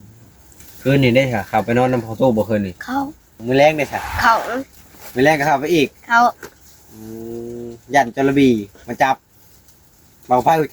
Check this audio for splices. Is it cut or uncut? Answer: cut